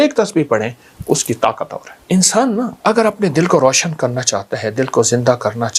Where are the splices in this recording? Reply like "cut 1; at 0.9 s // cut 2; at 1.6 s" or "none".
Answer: cut 1; at 1.9 s // cut 2; at 2.7 s

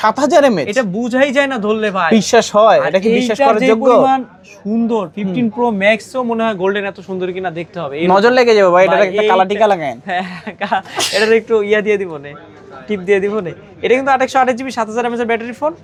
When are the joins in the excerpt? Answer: none

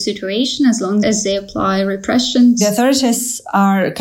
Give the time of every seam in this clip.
cut 1; at 1.0 s // cut 2; at 2.6 s

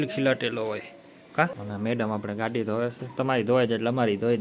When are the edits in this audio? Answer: cut 1; at 1.6 s

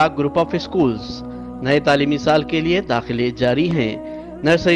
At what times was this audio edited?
none

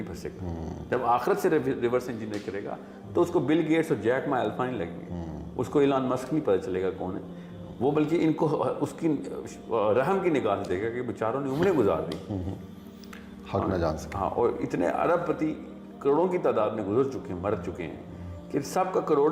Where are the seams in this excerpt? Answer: none

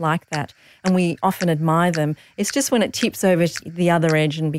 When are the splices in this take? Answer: cut 1; at 3.6 s

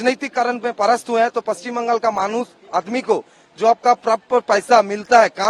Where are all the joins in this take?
none

